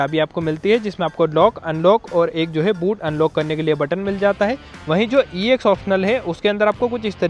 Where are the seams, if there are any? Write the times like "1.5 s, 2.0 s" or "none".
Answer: 4.7 s